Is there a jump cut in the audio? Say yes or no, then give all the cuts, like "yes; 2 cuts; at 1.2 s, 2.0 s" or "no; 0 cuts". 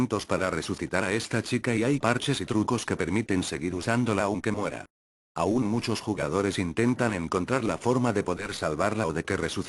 yes; 1 cut; at 2.1 s